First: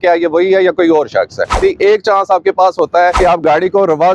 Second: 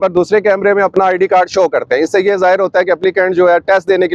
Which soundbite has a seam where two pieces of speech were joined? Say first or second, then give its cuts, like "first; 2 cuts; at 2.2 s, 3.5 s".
first; 2 cuts; at 1.5 s, 3.2 s